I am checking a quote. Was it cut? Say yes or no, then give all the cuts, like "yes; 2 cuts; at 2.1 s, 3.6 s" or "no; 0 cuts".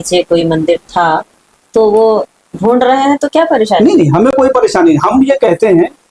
no; 0 cuts